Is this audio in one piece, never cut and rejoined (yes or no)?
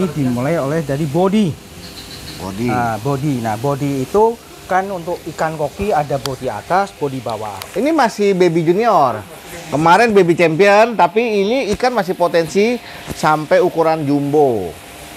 no